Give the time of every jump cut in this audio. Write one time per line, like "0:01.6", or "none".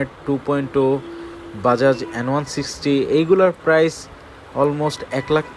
none